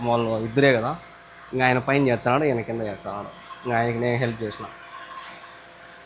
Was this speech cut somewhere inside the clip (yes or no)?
no